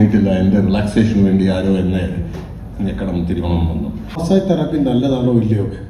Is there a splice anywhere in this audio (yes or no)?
yes